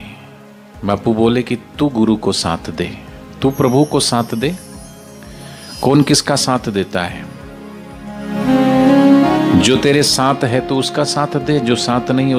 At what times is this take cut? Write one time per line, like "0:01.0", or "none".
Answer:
none